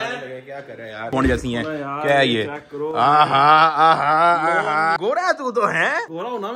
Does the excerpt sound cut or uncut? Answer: cut